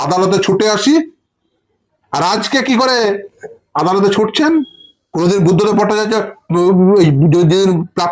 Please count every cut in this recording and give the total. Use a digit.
1